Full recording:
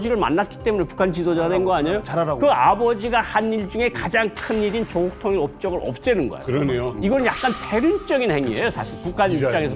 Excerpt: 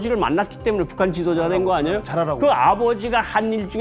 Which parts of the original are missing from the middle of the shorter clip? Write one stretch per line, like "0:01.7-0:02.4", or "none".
none